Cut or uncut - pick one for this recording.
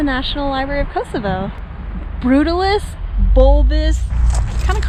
uncut